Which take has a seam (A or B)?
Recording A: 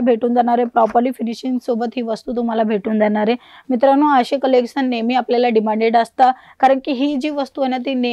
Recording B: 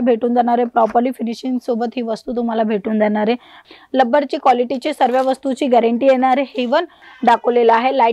B